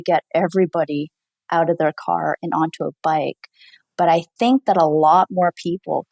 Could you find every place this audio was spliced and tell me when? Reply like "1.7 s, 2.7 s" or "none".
none